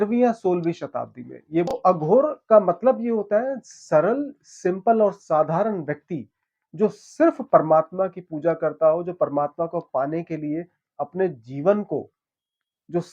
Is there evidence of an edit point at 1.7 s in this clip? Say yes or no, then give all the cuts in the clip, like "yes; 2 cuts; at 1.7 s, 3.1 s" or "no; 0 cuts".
yes; 1 cut; at 1.7 s